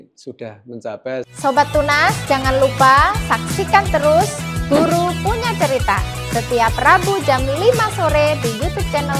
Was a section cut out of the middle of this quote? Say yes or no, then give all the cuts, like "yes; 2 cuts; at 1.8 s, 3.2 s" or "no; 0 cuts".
yes; 1 cut; at 1.3 s